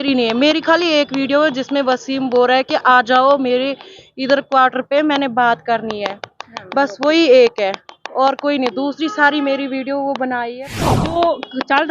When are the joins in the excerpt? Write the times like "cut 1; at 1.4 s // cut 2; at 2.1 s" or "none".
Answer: cut 1; at 10.9 s